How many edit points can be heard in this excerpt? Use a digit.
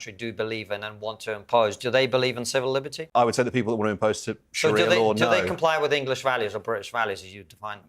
1